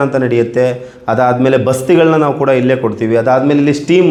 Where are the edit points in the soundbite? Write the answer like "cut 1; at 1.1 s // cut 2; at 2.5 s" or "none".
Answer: none

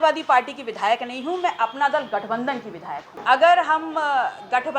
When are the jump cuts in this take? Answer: cut 1; at 3.1 s

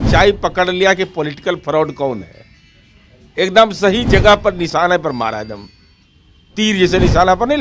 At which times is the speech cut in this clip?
none

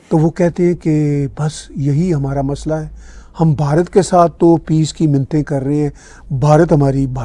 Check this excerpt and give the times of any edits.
none

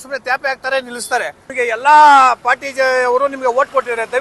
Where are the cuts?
cut 1; at 1.4 s

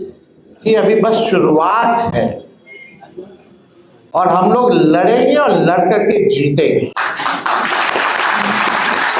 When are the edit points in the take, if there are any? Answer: none

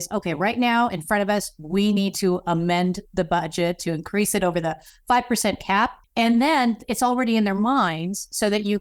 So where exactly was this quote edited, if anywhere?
cut 1; at 6.0 s

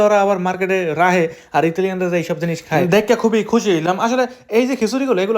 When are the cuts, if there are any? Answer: none

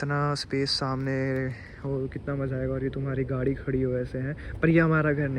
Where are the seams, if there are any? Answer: none

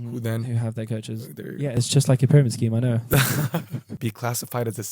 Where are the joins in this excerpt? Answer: cut 1; at 4.0 s

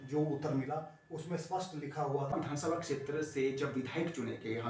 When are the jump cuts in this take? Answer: cut 1; at 2.3 s

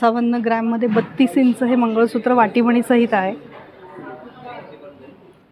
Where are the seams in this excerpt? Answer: none

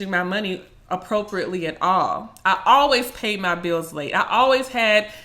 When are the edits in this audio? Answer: none

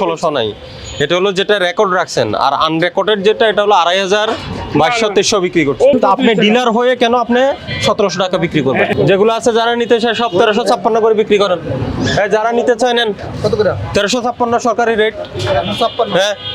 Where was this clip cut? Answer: cut 1; at 5.9 s // cut 2; at 8.9 s

